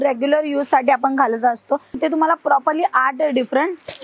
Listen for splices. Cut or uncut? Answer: cut